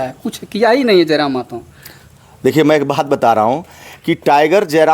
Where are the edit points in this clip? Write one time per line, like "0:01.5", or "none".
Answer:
none